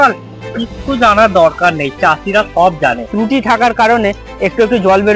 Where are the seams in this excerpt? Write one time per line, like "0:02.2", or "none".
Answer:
0:03.0